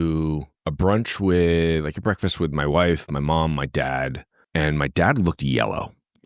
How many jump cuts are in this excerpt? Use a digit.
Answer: 1